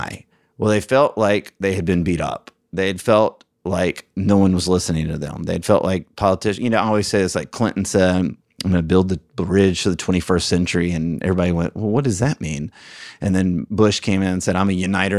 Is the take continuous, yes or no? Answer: yes